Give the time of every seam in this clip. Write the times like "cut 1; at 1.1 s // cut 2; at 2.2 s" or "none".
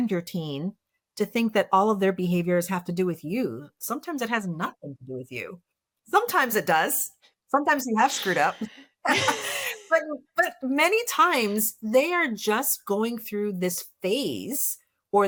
none